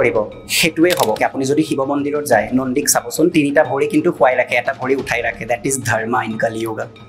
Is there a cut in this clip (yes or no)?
yes